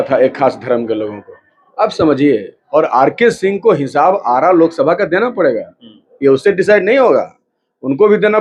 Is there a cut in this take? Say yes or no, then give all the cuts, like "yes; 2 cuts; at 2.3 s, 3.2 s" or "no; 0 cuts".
yes; 1 cut; at 2.5 s